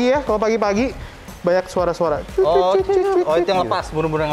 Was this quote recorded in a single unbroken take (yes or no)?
yes